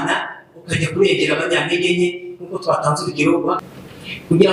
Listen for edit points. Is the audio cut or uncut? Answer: cut